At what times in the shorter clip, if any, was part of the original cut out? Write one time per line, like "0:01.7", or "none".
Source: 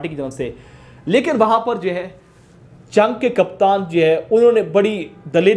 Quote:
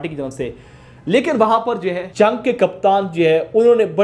0:02.0